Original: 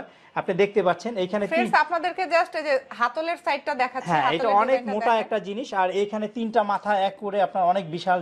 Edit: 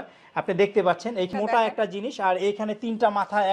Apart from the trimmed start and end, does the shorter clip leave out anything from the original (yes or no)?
yes